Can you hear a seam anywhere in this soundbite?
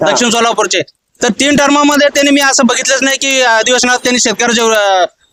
no; 0 cuts

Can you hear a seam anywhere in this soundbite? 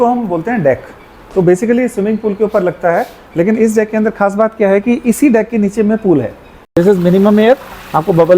yes; 1 cut; at 6.7 s

